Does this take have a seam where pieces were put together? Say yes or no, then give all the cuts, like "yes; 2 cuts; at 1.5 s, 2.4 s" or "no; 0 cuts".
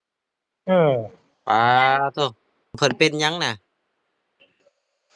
yes; 1 cut; at 2.8 s